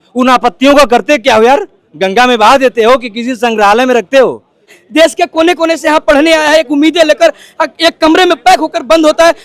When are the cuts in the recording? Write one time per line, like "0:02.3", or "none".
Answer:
0:04.8